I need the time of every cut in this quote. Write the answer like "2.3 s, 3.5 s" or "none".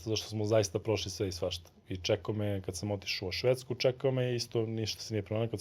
none